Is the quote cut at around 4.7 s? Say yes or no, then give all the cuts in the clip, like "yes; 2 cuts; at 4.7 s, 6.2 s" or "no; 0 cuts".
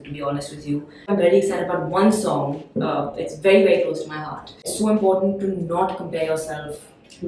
yes; 2 cuts; at 1.1 s, 4.7 s